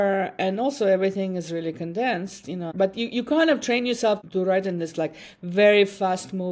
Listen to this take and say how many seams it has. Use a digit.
2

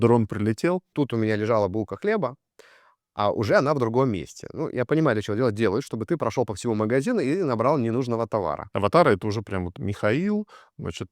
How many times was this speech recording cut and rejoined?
2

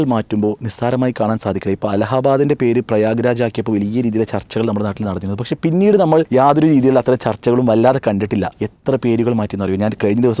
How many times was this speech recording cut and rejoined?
2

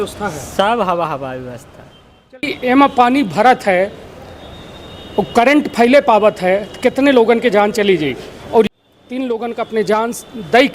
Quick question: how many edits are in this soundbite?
2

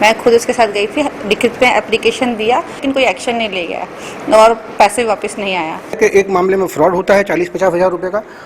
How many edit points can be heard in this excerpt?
2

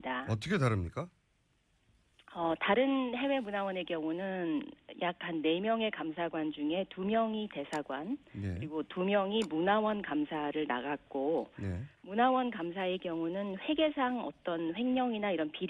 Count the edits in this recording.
0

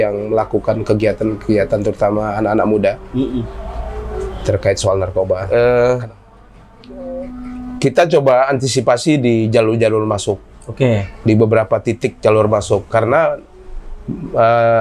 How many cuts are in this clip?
1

